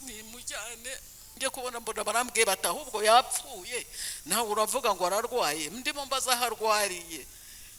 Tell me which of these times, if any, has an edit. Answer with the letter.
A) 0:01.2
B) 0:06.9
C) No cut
A